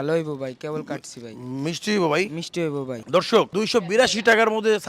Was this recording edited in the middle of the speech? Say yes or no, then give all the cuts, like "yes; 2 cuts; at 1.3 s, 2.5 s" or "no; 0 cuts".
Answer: yes; 1 cut; at 3.0 s